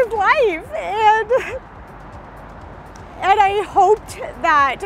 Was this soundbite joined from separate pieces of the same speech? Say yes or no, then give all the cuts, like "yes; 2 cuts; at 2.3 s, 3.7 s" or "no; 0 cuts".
yes; 1 cut; at 3.1 s